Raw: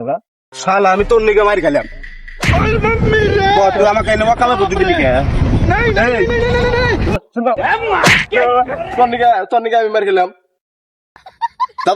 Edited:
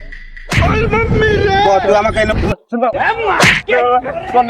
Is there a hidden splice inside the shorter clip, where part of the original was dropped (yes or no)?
yes